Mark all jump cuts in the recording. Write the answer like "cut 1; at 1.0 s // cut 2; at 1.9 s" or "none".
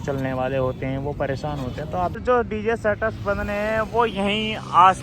cut 1; at 2.2 s